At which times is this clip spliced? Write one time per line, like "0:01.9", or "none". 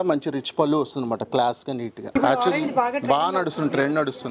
0:02.1